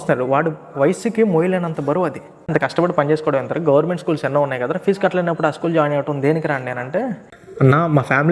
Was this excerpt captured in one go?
no; 1 cut; at 2.5 s

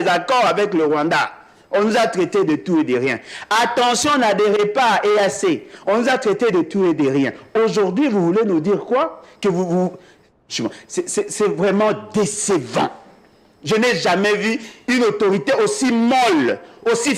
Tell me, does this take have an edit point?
no; 0 cuts

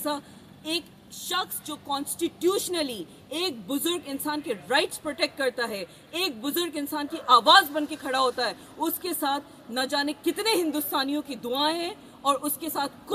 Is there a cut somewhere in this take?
no; 0 cuts

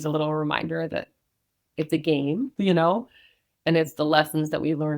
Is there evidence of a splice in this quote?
yes; 1 cut; at 2.5 s

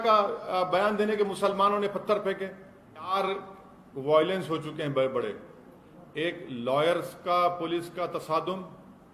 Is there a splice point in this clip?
yes; 1 cut; at 3.1 s

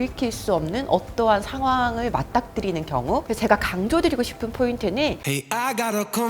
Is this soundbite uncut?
no; 1 cut; at 5.3 s

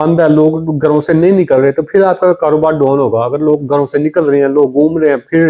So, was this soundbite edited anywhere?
no; 0 cuts

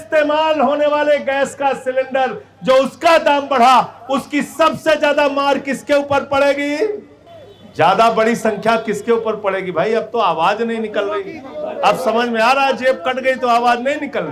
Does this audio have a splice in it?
no; 0 cuts

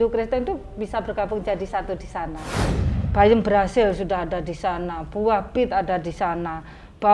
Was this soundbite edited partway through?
yes; 1 cut; at 2.8 s

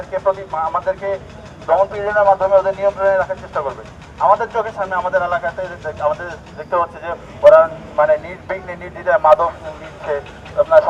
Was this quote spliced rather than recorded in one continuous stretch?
no; 0 cuts

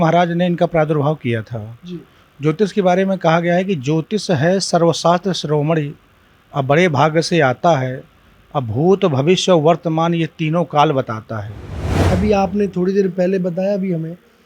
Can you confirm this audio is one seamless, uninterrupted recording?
no; 1 cut; at 12.1 s

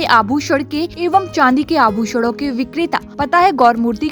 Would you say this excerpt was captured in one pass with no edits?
no; 2 cuts; at 0.9 s, 3.1 s

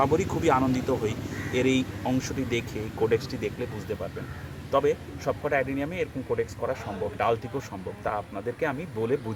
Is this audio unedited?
yes; 0 cuts

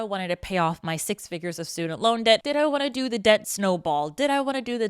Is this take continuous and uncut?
no; 2 cuts; at 2.4 s, 3.5 s

